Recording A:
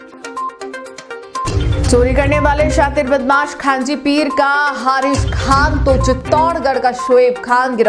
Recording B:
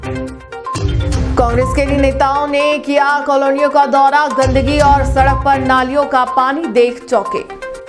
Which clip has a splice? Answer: A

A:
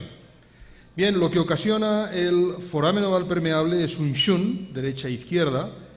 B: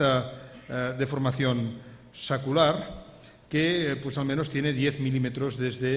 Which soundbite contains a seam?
A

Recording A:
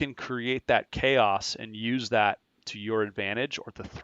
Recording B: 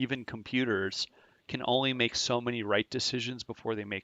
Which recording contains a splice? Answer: A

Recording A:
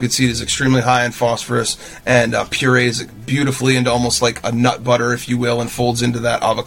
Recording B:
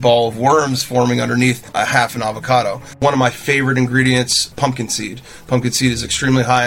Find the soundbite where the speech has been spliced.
B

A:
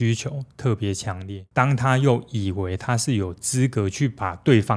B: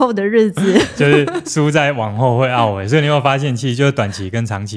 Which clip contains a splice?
A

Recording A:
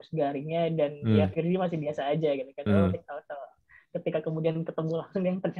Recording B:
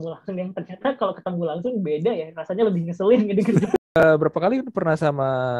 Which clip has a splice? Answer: B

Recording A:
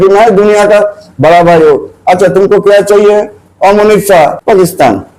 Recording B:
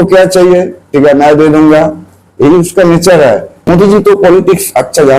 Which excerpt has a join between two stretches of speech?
B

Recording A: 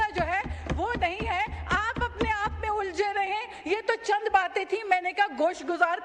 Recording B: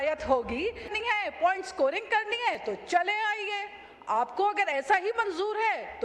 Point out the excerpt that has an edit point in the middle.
B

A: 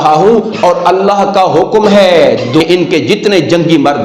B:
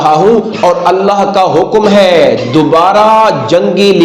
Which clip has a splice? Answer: A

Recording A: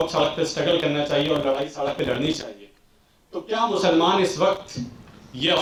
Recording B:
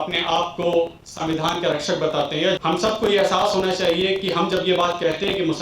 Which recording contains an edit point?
B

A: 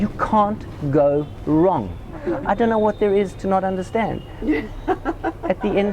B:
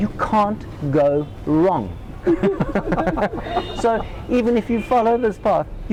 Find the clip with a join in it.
A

